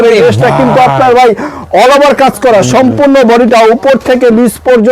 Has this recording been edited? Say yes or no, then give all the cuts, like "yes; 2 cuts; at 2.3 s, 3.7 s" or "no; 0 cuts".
no; 0 cuts